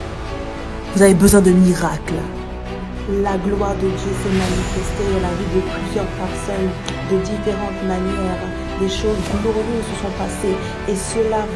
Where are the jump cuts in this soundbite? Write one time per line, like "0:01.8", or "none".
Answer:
0:00.9

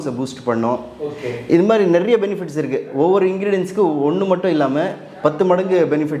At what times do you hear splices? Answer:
none

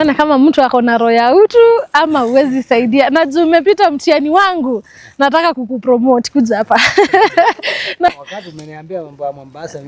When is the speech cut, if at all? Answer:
0:08.1

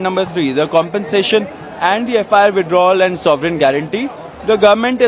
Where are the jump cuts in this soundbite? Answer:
none

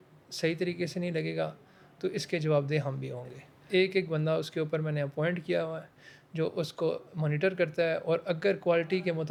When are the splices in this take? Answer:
none

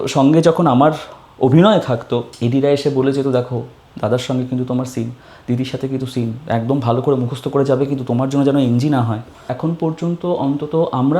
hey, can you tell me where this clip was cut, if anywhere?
0:02.3
0:09.5

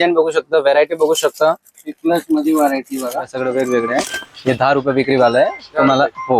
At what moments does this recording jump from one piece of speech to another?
0:03.3

